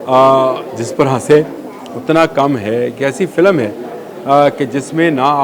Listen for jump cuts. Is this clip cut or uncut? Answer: uncut